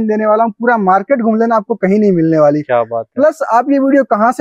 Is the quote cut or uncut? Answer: uncut